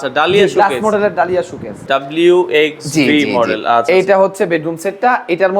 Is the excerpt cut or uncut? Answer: cut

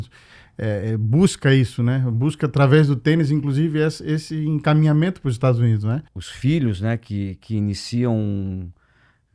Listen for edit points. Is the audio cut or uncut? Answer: cut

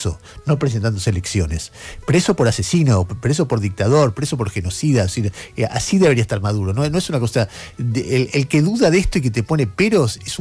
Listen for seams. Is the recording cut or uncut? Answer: uncut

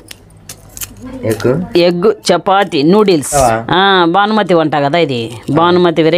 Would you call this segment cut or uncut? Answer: cut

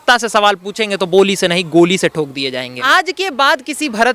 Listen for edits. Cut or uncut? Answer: cut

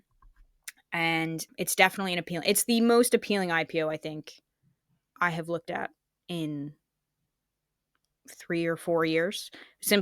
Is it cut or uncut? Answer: cut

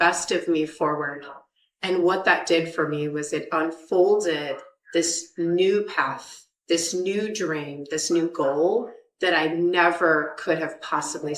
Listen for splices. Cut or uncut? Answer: uncut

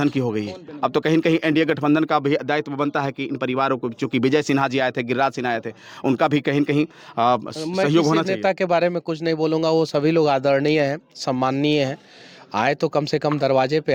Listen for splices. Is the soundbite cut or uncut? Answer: uncut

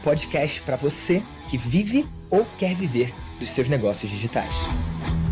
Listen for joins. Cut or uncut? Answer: uncut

